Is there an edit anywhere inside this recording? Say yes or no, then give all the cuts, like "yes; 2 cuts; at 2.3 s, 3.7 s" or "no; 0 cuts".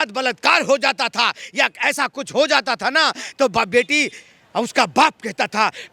no; 0 cuts